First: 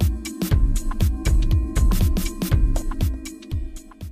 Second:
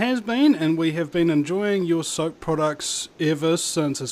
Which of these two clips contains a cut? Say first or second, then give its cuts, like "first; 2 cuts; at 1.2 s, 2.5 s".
first; 1 cut; at 1.7 s